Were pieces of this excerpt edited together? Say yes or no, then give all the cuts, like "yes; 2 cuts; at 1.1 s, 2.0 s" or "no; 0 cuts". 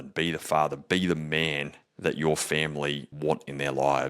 yes; 1 cut; at 3.1 s